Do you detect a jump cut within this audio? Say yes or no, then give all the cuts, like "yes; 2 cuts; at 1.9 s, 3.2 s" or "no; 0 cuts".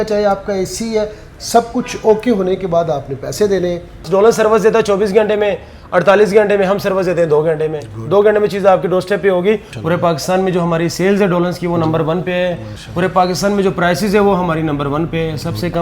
yes; 2 cuts; at 4.1 s, 9.7 s